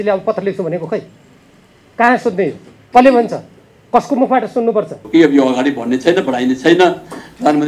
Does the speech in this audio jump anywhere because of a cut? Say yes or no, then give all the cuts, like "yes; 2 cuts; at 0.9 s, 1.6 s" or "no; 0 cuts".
yes; 1 cut; at 5.0 s